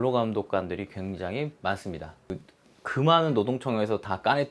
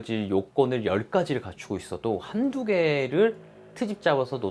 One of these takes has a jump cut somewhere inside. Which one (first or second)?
first